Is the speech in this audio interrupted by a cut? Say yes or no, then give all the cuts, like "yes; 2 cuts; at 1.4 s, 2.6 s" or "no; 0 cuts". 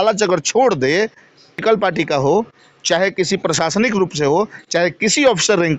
yes; 1 cut; at 1.6 s